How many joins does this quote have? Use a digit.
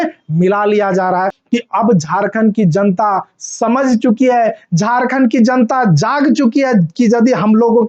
1